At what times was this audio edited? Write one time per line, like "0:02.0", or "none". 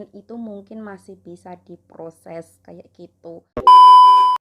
0:03.4